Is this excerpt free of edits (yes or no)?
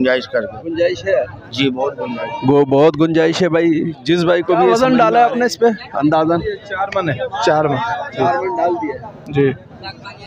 no